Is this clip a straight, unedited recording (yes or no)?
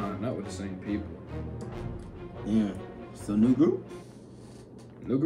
yes